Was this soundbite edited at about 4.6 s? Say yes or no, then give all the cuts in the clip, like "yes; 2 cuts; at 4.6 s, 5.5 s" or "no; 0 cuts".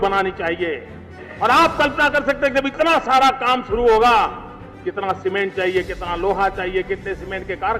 no; 1 cut; at 1.3 s